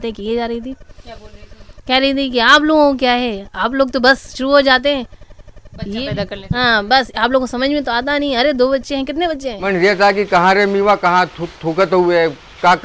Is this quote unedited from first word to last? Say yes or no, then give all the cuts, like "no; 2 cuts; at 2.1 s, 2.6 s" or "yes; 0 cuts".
no; 1 cut; at 9.6 s